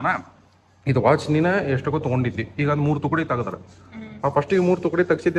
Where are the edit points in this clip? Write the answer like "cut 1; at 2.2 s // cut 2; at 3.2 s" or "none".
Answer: none

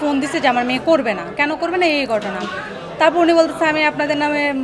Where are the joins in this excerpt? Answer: none

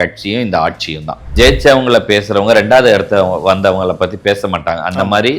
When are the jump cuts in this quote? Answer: cut 1; at 1.3 s

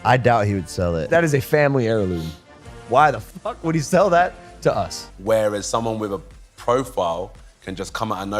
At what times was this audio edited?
cut 1; at 5.1 s

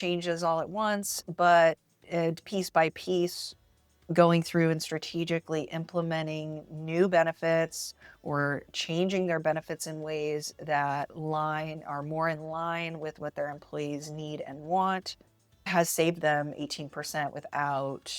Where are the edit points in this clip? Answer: cut 1; at 15.7 s

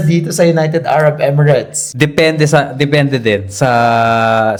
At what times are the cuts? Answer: none

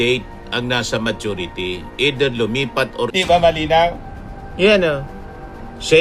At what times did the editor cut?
cut 1; at 3.1 s

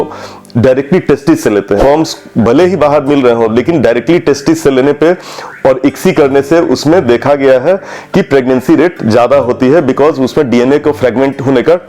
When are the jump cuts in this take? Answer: cut 1; at 1.8 s

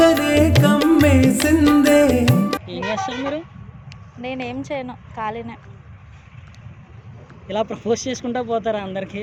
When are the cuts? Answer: none

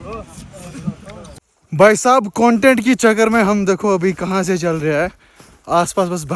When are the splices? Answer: cut 1; at 1.5 s

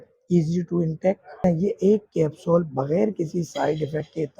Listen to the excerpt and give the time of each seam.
cut 1; at 1.4 s

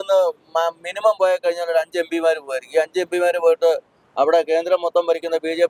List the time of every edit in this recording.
none

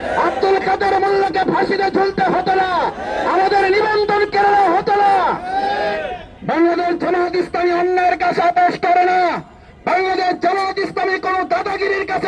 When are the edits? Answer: cut 1; at 6.2 s

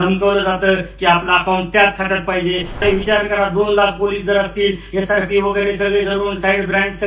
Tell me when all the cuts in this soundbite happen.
cut 1; at 2.8 s

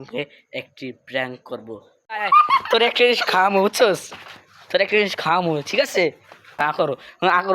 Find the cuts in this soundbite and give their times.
cut 1; at 2.1 s // cut 2; at 6.8 s

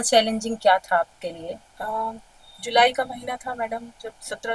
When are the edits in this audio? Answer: none

